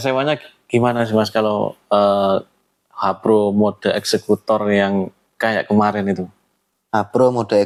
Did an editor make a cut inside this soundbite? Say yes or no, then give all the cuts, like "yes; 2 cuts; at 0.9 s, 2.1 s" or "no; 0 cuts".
no; 0 cuts